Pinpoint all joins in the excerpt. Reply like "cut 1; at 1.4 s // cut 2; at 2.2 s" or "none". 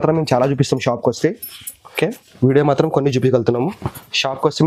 none